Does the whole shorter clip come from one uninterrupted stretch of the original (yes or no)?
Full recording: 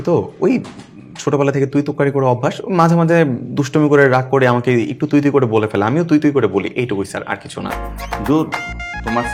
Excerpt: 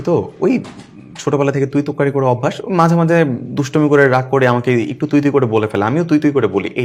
yes